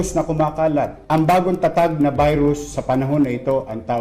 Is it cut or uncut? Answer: cut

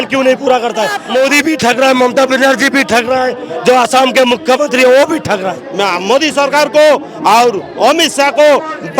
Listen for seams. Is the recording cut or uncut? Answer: cut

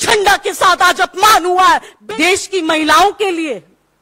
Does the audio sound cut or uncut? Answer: cut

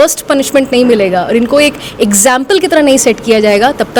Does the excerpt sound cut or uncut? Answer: uncut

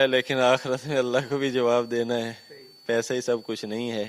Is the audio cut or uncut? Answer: uncut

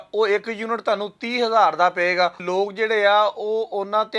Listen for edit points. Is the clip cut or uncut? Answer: cut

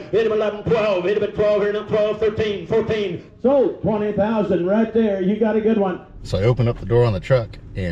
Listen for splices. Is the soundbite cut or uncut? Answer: cut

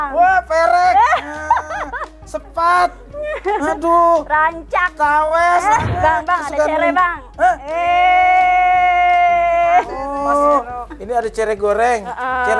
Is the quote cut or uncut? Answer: cut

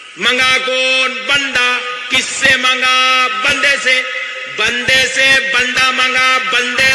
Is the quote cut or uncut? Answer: uncut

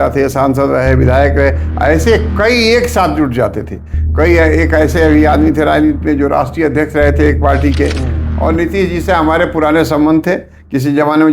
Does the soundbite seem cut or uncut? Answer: cut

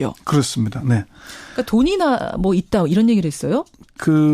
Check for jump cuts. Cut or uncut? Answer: cut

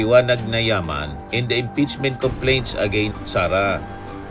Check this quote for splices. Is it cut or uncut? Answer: uncut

